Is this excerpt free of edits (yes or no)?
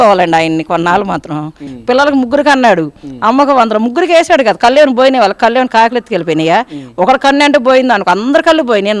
no